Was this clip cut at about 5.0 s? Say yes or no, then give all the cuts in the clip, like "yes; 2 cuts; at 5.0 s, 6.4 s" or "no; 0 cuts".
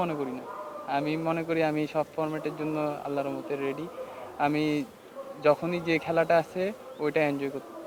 no; 0 cuts